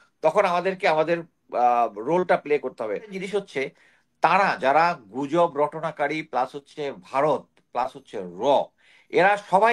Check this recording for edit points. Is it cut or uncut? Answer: cut